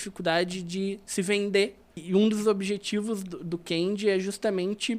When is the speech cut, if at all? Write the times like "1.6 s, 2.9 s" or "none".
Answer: 2.0 s